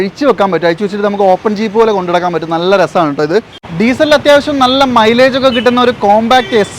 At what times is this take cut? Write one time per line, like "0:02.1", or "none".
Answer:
0:03.6